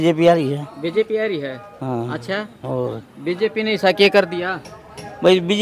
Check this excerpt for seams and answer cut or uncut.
uncut